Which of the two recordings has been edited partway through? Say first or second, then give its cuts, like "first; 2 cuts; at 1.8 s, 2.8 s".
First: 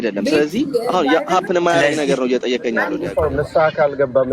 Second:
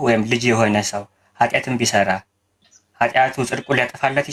first; 1 cut; at 3.0 s